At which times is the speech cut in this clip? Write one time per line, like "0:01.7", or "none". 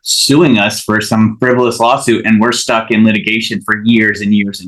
none